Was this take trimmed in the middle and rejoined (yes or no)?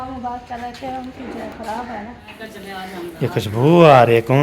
yes